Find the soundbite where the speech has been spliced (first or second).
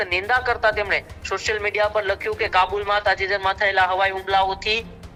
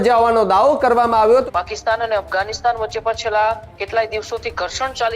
second